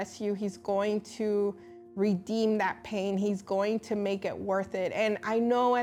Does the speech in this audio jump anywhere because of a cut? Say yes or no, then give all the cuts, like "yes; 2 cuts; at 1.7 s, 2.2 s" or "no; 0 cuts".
no; 0 cuts